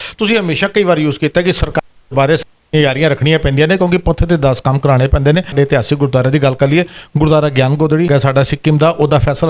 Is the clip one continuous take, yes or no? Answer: no